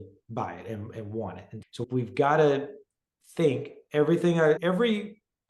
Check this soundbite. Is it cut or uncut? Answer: uncut